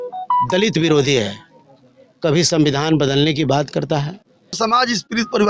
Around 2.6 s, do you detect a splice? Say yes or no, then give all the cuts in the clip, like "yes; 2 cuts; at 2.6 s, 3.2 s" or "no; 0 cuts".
no; 1 cut; at 4.6 s